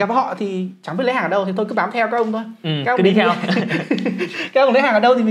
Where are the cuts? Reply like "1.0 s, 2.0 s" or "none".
none